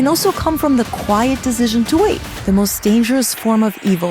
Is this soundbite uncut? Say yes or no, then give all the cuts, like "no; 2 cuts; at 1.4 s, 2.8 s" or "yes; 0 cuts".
no; 1 cut; at 2.3 s